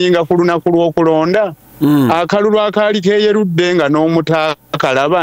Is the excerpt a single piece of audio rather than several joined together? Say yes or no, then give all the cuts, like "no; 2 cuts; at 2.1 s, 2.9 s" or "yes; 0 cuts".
yes; 0 cuts